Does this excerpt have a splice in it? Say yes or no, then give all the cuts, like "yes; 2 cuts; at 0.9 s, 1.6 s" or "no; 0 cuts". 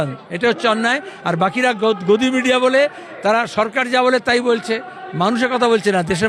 no; 0 cuts